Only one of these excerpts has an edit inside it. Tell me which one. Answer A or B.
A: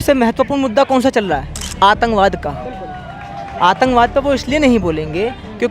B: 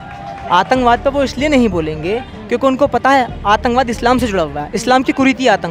A